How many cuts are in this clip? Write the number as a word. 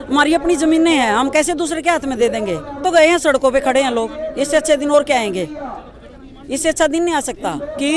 one